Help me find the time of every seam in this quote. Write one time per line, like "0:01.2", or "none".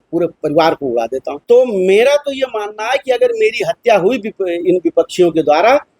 0:01.3